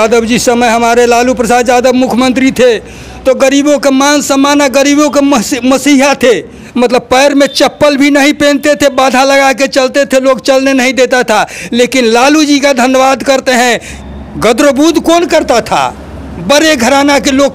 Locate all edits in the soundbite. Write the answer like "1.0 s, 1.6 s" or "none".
6.6 s, 13.9 s